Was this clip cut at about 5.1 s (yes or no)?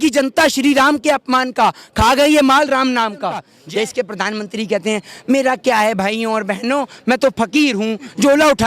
no